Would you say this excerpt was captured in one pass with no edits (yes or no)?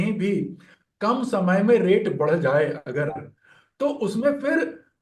yes